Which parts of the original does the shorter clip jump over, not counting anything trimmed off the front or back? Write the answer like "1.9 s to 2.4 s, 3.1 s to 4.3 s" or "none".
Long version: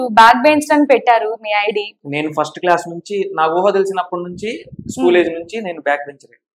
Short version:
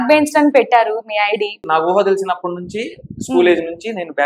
2.0 s to 3.3 s